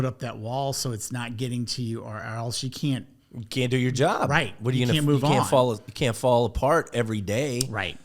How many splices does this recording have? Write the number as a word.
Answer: zero